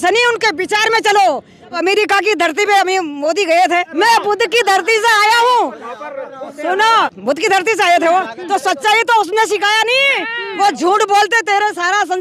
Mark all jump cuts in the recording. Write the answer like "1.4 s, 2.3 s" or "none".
1.8 s, 3.9 s, 7.2 s